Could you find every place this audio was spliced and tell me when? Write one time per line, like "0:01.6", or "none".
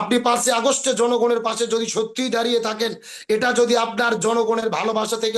none